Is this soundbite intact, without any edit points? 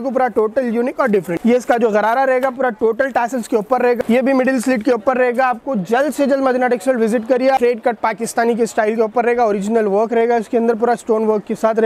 no; 3 cuts; at 1.3 s, 4.0 s, 7.6 s

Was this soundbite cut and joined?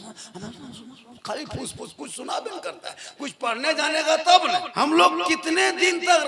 yes; 1 cut; at 4.7 s

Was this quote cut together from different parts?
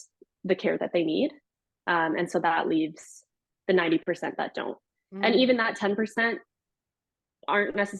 no; 0 cuts

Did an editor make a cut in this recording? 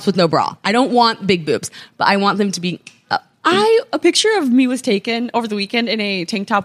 no; 0 cuts

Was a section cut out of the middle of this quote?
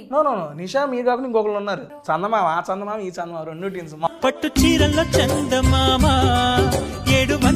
yes; 2 cuts; at 1.9 s, 4.1 s

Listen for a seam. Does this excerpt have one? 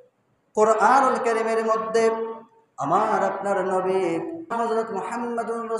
yes; 1 cut; at 4.5 s

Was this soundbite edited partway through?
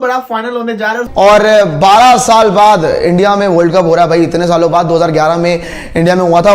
yes; 1 cut; at 1.0 s

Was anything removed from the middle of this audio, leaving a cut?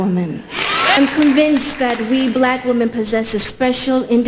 yes; 1 cut; at 1.0 s

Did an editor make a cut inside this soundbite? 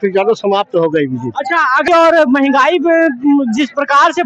yes; 1 cut; at 1.9 s

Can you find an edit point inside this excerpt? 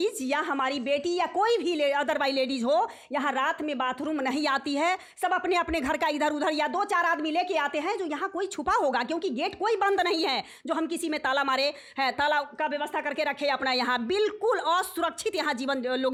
no; 0 cuts

